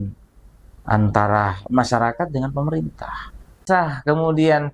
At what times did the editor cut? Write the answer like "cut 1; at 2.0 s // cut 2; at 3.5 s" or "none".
cut 1; at 3.6 s